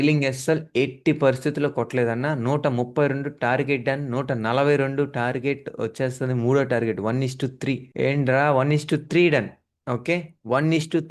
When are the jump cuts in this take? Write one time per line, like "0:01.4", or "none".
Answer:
none